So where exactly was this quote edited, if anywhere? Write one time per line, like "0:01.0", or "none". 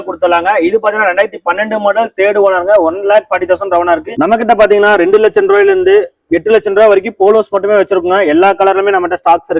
0:04.1